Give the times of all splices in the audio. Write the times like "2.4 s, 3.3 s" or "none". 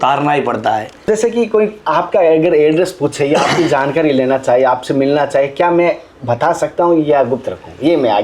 1.1 s